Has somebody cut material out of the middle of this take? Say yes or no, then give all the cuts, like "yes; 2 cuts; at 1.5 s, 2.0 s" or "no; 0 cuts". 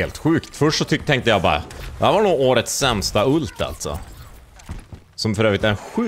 no; 0 cuts